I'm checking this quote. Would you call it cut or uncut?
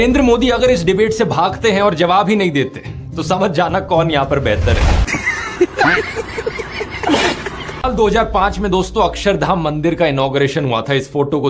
cut